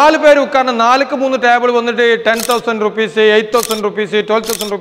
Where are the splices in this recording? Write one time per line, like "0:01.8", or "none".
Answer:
none